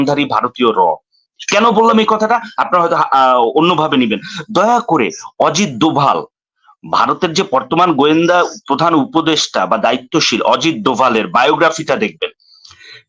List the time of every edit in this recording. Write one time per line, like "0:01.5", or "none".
none

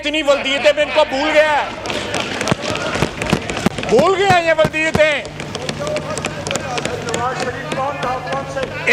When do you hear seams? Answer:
none

